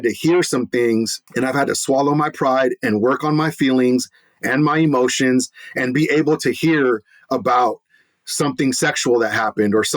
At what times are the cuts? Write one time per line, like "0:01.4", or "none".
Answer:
0:01.2

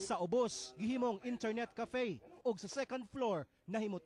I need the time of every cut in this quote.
none

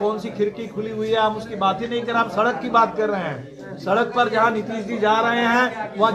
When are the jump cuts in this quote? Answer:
none

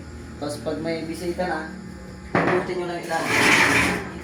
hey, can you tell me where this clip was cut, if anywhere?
none

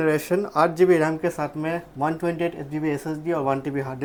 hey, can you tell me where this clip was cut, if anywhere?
none

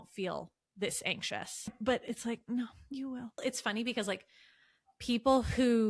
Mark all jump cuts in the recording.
0:01.7
0:03.4

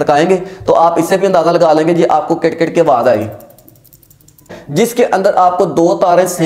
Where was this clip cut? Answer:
0:04.6

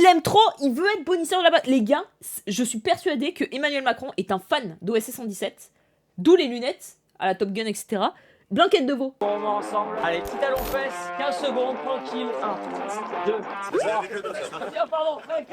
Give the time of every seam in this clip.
0:09.2

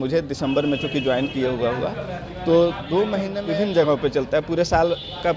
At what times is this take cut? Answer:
0:03.3

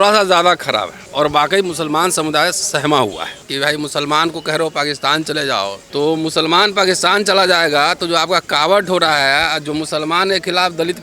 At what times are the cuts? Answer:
0:01.0
0:03.5
0:05.8

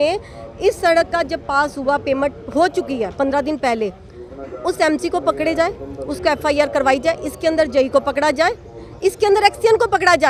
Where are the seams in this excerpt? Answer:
none

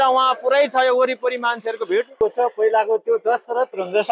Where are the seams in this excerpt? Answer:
0:02.2

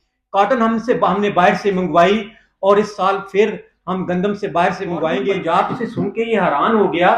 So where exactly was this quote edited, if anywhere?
0:05.3

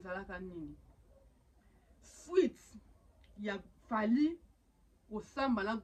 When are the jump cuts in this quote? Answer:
none

